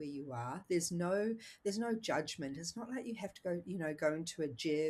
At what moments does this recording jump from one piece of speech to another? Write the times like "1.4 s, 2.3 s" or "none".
none